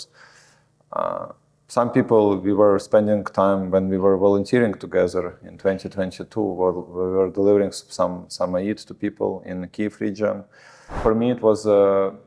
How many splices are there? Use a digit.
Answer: 1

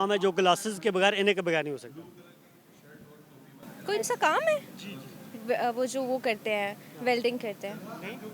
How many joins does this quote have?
0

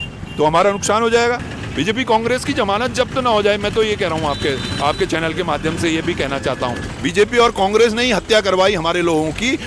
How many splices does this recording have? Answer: 2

